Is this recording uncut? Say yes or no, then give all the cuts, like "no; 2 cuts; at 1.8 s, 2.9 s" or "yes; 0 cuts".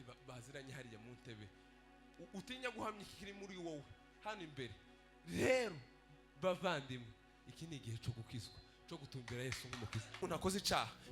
no; 1 cut; at 10.2 s